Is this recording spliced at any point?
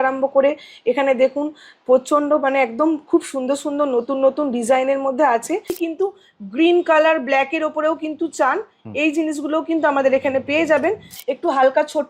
yes; 2 cuts; at 5.8 s, 11.1 s

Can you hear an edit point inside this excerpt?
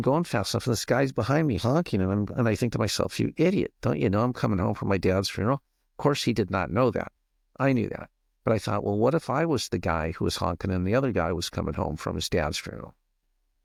no; 0 cuts

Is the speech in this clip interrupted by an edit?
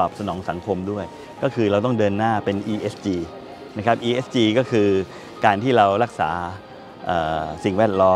no; 0 cuts

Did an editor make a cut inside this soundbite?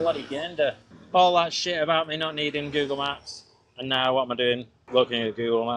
yes; 2 cuts; at 0.9 s, 4.7 s

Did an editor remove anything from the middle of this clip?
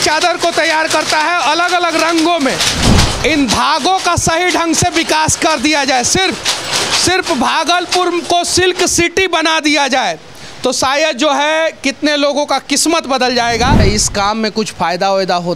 yes; 2 cuts; at 2.8 s, 13.8 s

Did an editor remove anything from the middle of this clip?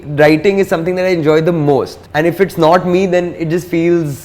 yes; 1 cut; at 2.0 s

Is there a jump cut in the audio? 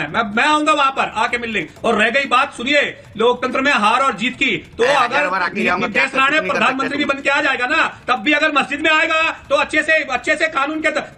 no; 0 cuts

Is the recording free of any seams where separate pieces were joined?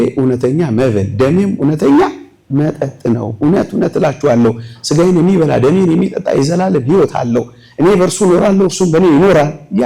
yes; 0 cuts

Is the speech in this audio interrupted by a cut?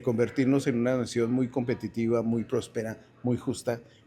no; 0 cuts

